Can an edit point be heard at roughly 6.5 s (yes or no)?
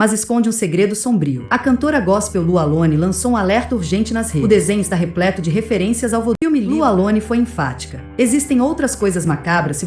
yes